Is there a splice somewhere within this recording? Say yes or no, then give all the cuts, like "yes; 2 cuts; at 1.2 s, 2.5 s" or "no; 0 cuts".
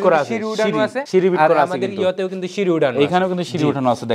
no; 0 cuts